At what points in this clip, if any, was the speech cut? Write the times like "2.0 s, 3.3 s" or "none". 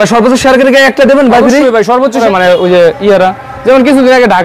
2.2 s